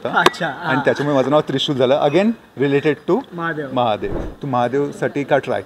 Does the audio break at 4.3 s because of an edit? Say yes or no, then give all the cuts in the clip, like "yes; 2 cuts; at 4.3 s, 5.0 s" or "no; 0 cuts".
yes; 1 cut; at 4.3 s